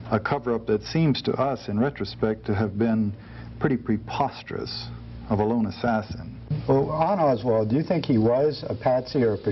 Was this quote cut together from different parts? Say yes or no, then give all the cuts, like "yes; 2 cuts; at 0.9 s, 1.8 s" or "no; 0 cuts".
yes; 1 cut; at 6.4 s